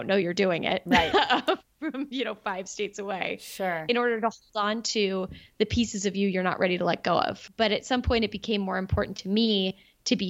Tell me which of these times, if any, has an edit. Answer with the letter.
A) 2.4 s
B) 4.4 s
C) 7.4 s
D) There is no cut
C